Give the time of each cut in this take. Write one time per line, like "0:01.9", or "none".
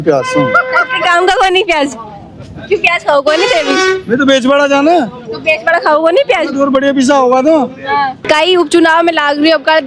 none